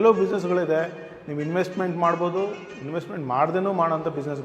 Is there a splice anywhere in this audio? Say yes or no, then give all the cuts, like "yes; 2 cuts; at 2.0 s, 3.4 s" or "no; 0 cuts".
no; 0 cuts